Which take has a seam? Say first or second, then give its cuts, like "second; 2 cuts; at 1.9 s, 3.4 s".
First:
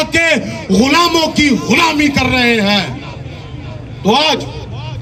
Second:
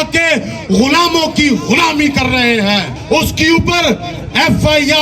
second; 1 cut; at 2.9 s